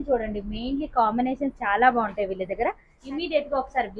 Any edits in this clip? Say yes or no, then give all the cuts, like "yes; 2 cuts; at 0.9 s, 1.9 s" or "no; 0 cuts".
yes; 1 cut; at 2.9 s